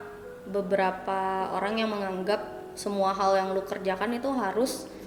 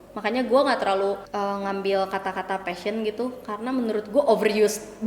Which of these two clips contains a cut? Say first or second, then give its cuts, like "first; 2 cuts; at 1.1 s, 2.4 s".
second; 1 cut; at 1.2 s